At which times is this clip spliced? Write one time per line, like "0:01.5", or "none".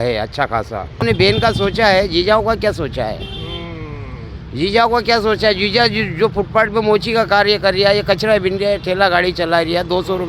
0:01.0